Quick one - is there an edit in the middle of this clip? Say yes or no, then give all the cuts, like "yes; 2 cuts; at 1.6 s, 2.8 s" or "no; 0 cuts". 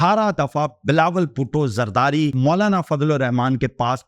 no; 0 cuts